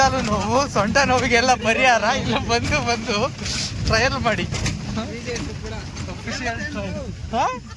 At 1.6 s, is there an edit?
no; 0 cuts

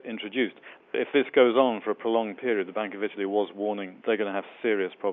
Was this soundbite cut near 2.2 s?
no; 2 cuts; at 0.9 s, 3.9 s

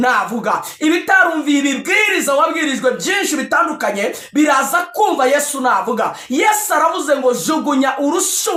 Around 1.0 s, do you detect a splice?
no; 0 cuts

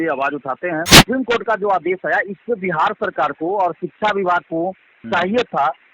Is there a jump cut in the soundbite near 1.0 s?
yes; 1 cut; at 1.0 s

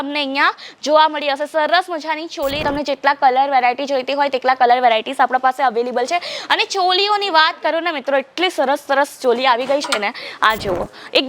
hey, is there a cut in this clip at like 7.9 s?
no; 1 cut; at 2.6 s

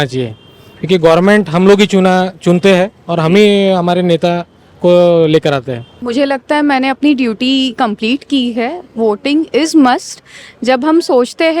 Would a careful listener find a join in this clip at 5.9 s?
yes; 1 cut; at 5.9 s

